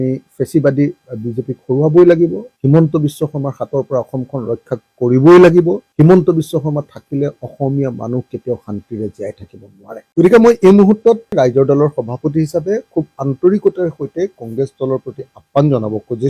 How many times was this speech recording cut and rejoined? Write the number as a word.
two